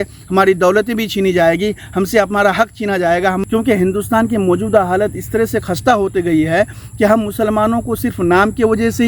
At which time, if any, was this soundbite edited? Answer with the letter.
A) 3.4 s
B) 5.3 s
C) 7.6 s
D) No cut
A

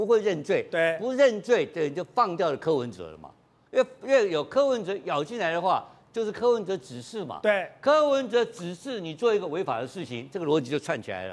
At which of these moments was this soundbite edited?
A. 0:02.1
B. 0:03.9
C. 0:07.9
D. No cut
D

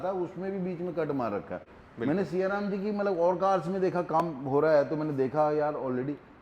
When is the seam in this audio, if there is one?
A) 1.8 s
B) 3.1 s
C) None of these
A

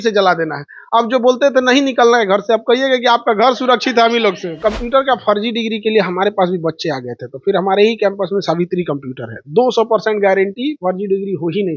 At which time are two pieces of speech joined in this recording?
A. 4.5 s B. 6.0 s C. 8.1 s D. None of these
A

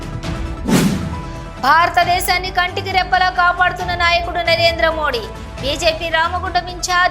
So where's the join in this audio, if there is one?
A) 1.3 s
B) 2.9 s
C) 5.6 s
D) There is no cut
A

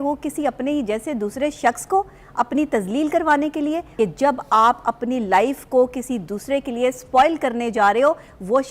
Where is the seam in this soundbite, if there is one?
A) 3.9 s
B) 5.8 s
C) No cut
A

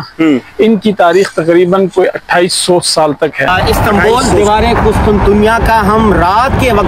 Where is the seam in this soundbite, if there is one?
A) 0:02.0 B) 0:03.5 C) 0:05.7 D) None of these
B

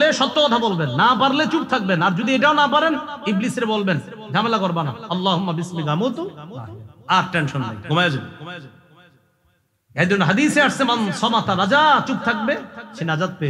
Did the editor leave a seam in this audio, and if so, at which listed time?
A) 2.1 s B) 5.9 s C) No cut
C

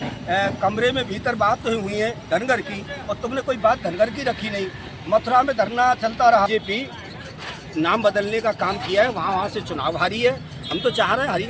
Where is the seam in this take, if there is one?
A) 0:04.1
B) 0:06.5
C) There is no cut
B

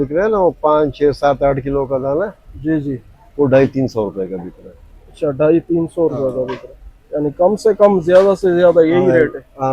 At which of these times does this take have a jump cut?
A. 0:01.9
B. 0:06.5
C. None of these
C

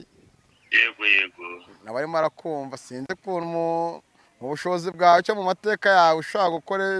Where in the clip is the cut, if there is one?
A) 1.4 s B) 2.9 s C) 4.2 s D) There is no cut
D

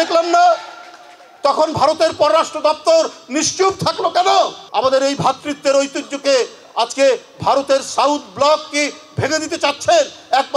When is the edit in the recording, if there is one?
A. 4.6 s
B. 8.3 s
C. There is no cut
A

